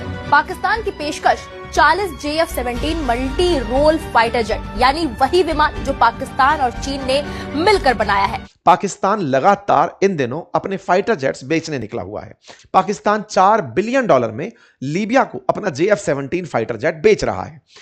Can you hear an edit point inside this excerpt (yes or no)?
yes